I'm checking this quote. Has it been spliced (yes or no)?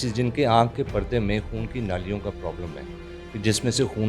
no